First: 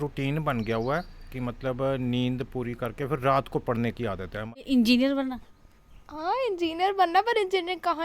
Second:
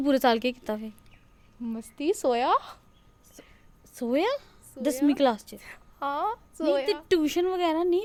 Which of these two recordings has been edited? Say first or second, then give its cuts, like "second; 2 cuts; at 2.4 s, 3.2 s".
first; 1 cut; at 4.4 s